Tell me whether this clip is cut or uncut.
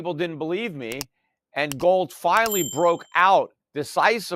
uncut